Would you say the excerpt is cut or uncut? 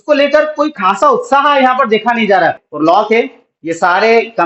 cut